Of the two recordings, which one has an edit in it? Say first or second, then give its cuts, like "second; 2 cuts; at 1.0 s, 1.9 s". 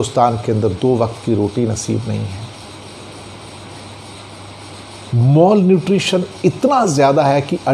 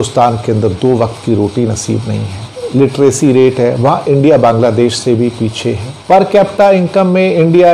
second; 2 cuts; at 2.6 s, 5.9 s